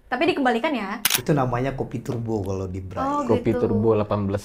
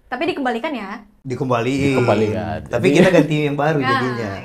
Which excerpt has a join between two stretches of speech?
first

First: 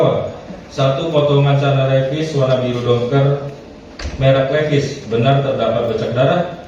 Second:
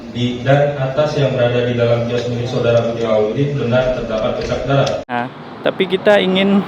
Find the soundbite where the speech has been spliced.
second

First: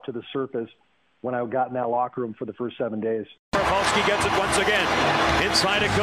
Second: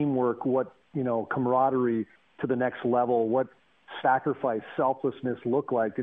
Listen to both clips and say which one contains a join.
first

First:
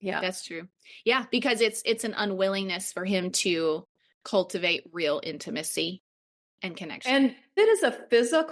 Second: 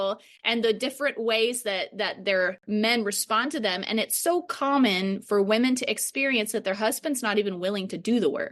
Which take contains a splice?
first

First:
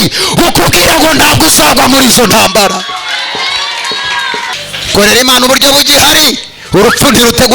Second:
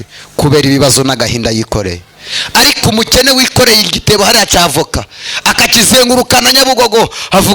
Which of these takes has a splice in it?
first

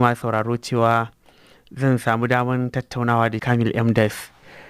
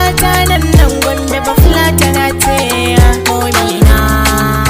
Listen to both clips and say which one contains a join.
first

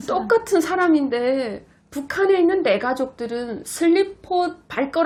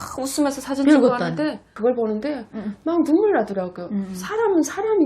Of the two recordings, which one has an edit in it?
second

